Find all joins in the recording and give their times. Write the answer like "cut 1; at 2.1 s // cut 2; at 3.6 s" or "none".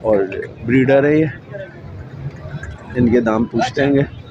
none

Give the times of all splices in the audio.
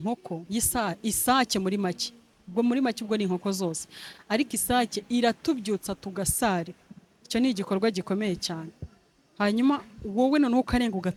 none

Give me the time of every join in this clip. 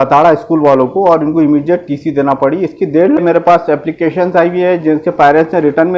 cut 1; at 3.2 s

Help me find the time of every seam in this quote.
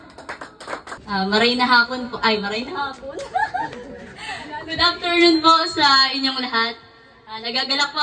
none

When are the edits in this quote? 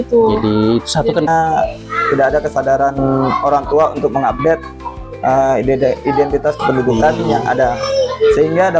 cut 1; at 1.3 s

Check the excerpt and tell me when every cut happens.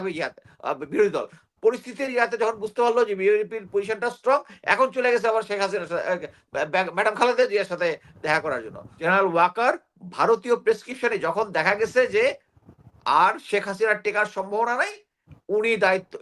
cut 1; at 8.9 s

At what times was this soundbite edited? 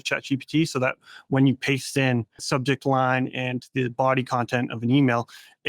cut 1; at 2.4 s

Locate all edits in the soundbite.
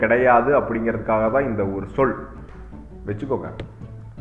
none

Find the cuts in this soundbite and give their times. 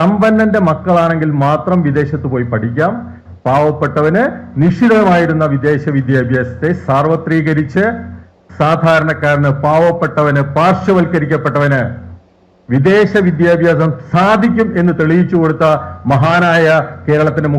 none

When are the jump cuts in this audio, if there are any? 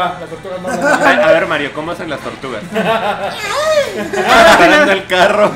cut 1; at 1.1 s // cut 2; at 4.6 s

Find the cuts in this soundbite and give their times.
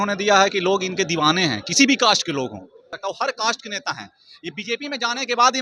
cut 1; at 2.9 s

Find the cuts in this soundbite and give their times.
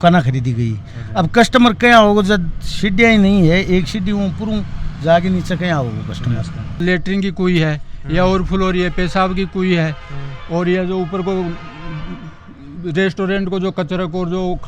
cut 1; at 6.6 s

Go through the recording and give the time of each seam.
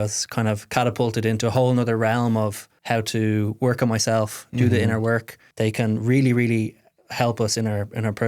cut 1; at 2.7 s // cut 2; at 5.4 s

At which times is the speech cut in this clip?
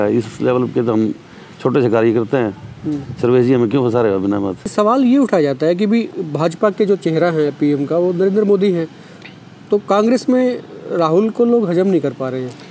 cut 1; at 4.7 s

